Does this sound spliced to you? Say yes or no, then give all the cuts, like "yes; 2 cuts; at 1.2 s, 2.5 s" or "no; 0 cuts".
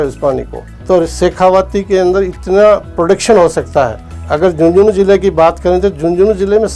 no; 0 cuts